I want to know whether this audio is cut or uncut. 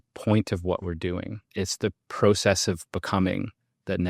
cut